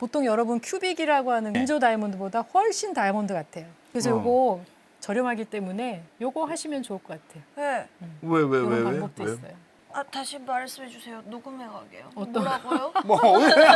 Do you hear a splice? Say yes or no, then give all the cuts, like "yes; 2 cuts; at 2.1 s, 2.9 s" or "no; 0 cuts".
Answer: no; 0 cuts